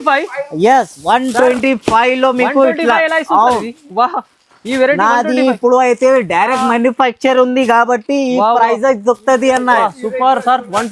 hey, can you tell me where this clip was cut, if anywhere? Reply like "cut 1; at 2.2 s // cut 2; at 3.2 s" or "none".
none